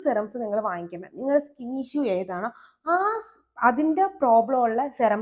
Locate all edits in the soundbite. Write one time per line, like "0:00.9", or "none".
none

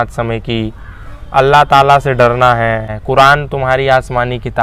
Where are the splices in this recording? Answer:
0:03.0

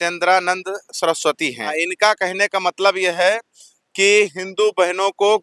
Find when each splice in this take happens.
none

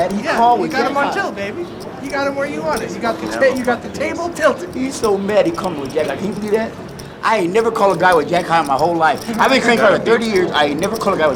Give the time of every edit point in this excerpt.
none

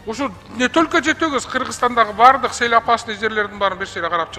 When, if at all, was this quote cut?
none

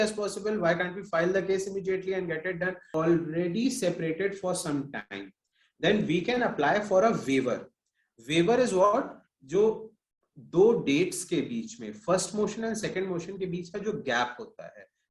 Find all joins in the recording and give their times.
0:02.8

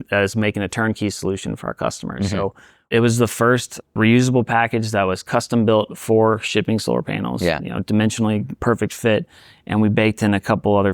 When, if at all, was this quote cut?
0:02.9
0:03.9

